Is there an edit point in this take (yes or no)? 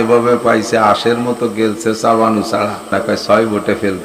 yes